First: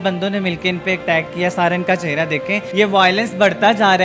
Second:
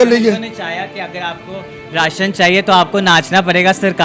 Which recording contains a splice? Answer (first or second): first